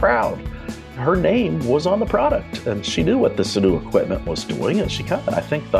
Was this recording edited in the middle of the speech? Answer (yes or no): yes